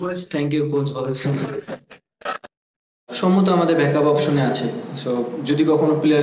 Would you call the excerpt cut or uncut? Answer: cut